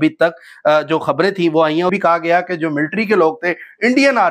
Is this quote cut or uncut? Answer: cut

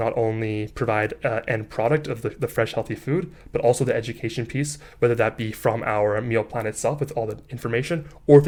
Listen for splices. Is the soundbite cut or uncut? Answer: uncut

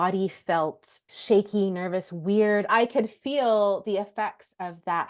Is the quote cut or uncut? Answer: cut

